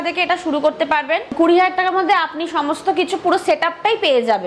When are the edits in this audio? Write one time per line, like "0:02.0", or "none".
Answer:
0:01.3